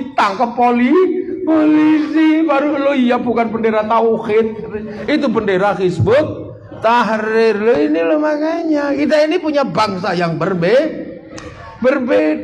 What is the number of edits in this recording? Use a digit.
0